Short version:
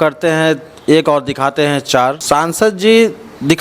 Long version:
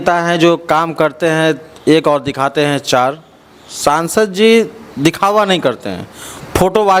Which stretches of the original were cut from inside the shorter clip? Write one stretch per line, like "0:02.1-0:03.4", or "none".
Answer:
0:03.2-0:03.7

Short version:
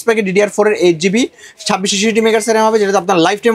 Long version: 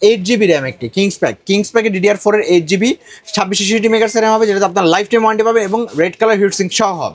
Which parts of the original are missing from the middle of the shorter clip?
none

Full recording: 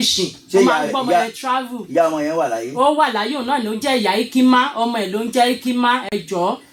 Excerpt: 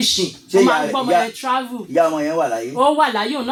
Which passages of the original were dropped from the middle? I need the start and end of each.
none

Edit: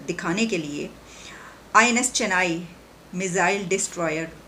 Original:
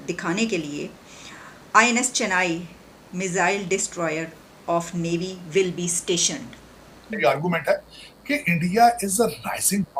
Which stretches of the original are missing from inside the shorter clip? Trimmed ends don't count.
none

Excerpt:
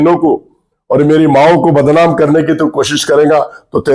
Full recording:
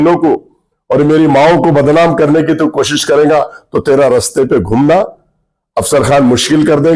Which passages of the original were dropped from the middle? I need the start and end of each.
none

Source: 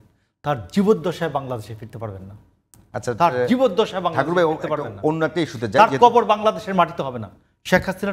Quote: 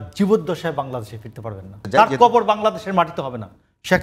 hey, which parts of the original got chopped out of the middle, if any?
0:02.4-0:05.6

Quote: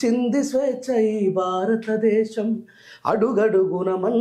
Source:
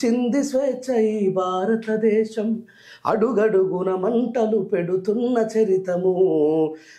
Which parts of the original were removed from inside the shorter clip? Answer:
none

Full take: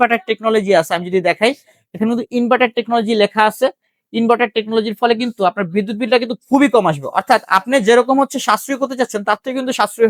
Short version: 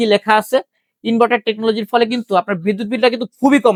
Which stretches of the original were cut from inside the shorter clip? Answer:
none

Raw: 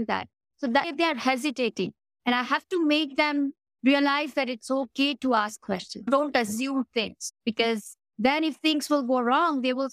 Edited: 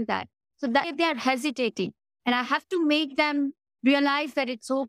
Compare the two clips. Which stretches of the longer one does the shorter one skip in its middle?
none

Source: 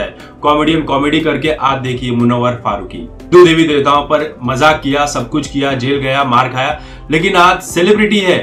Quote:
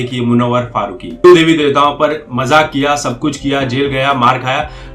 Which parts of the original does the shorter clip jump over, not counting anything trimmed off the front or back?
0:03.1-0:03.3

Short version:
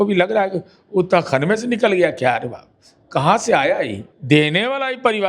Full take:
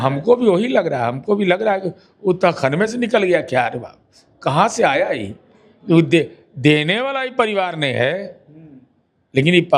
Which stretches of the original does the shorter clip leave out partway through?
0:05.4-0:06.4

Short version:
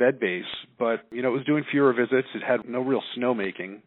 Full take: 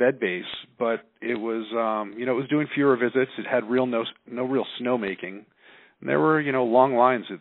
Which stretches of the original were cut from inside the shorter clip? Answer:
0:01.1-0:02.1
0:03.7-0:04.3

